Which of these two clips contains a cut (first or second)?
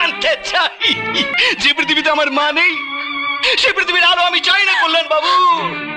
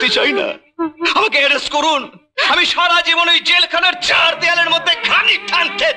first